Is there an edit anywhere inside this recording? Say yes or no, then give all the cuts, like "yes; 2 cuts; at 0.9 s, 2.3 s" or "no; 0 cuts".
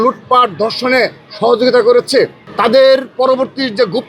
yes; 1 cut; at 2.4 s